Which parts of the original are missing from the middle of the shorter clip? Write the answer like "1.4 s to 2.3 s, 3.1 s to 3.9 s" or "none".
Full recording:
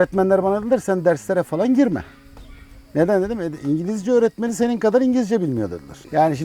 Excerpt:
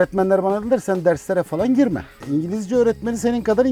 2.2 s to 3.5 s